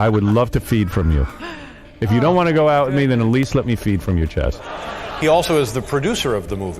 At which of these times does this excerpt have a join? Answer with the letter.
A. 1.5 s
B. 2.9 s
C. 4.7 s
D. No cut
C